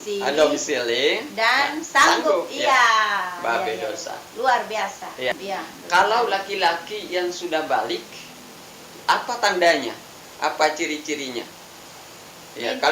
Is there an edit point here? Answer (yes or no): yes